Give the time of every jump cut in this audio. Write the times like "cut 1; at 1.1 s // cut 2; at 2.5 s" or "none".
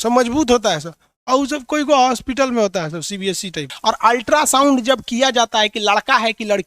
cut 1; at 3.7 s